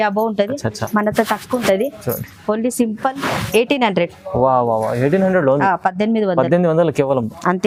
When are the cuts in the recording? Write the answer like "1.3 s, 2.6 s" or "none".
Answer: none